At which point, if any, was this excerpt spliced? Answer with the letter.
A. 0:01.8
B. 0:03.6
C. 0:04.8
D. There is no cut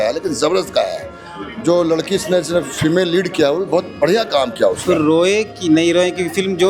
C